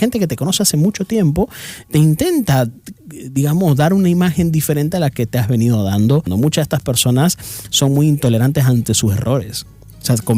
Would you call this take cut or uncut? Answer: cut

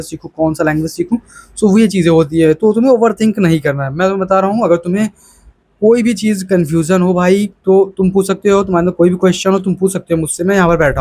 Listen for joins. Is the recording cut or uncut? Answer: uncut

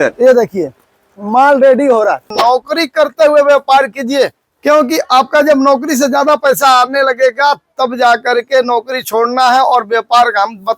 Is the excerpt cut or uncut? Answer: cut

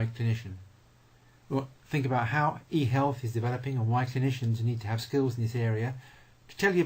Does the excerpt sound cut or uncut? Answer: cut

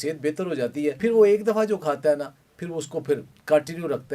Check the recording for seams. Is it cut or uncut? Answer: cut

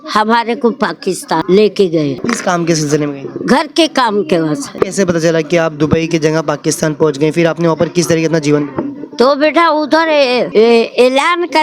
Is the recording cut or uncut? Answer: cut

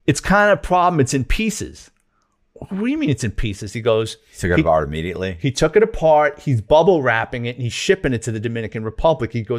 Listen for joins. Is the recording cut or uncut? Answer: uncut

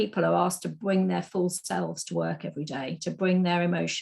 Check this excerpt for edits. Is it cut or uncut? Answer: uncut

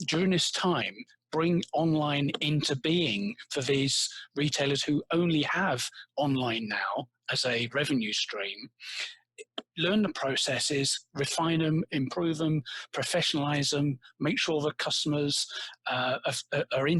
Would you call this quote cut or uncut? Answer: uncut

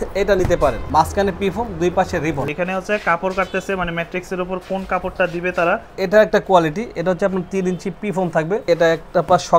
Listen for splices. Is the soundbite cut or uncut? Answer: cut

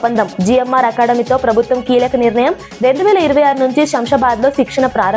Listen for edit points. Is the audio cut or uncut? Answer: uncut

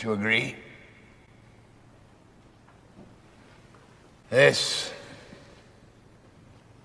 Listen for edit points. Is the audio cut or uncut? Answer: uncut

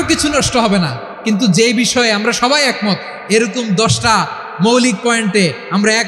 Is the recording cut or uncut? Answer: uncut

